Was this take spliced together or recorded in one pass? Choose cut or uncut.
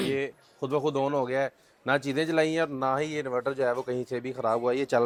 uncut